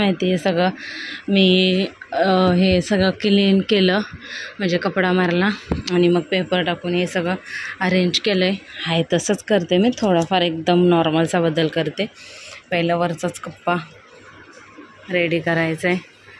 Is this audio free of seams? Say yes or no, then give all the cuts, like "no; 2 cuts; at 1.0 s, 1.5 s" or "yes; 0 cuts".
yes; 0 cuts